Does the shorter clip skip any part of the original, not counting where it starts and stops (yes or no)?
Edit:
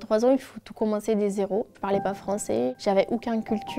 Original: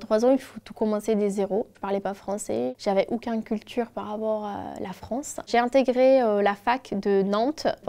no